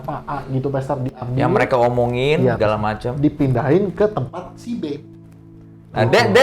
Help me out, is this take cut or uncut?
uncut